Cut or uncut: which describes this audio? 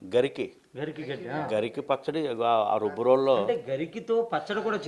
uncut